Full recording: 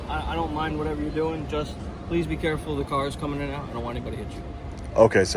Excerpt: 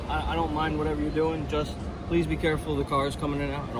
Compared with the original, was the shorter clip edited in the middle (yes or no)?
no